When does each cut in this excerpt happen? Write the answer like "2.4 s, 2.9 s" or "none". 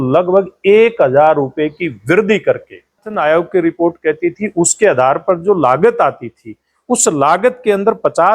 3.2 s